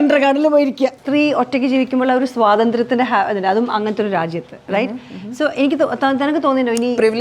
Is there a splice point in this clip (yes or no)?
yes